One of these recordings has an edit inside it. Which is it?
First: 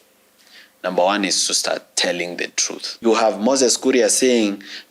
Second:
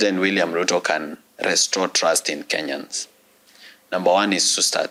first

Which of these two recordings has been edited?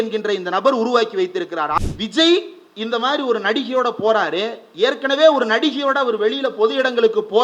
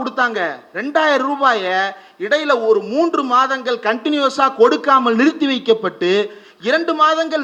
first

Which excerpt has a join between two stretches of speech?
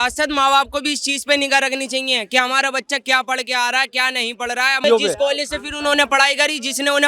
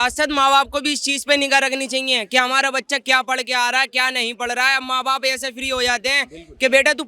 first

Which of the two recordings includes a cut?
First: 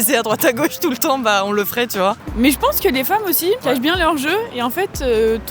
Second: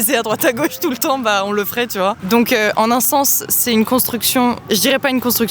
first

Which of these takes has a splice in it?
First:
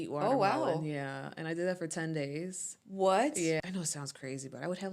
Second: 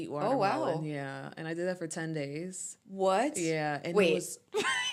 first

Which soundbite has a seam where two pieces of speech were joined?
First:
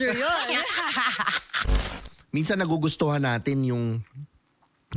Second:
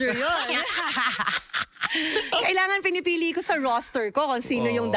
first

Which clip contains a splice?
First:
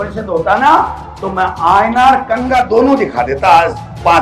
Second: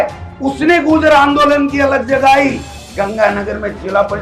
second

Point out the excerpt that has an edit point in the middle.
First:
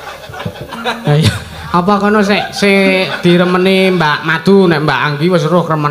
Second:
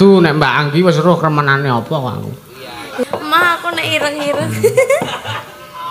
second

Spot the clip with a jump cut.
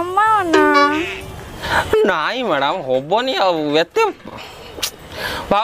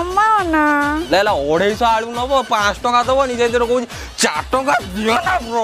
second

